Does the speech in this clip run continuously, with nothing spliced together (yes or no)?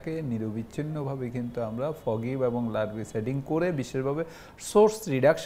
yes